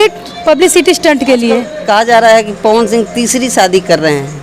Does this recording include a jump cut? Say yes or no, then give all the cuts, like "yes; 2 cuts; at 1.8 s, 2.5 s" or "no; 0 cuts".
yes; 1 cut; at 1.7 s